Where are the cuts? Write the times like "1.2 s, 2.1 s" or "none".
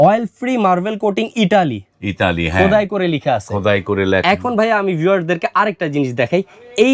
none